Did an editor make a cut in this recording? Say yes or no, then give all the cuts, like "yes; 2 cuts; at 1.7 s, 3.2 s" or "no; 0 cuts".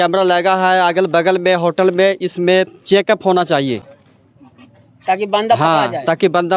no; 0 cuts